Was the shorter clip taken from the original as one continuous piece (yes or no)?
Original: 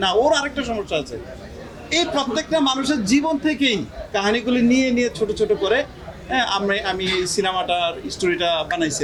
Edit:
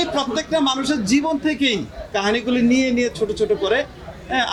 yes